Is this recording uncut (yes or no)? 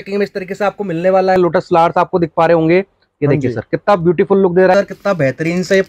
no